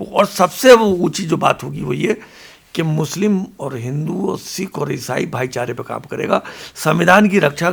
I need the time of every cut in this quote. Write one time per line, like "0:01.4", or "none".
none

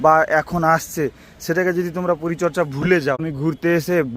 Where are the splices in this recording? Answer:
0:03.2

